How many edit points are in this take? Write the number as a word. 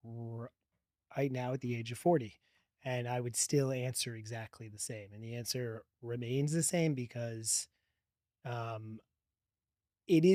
zero